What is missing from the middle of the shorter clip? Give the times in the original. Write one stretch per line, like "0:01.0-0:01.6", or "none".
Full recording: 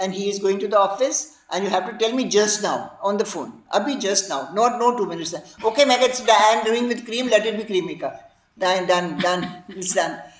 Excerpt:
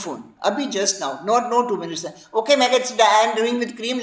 none